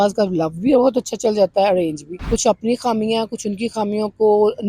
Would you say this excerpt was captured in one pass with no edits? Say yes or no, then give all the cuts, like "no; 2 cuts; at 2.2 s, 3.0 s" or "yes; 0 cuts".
no; 1 cut; at 2.0 s